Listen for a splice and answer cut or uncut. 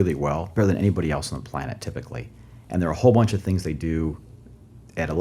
uncut